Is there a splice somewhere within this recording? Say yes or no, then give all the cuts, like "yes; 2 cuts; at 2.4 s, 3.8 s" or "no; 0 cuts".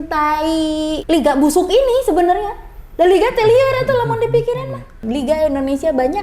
yes; 2 cuts; at 1.0 s, 5.0 s